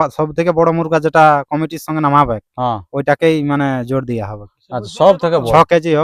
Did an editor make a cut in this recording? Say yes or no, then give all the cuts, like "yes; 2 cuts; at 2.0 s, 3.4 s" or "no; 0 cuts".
no; 0 cuts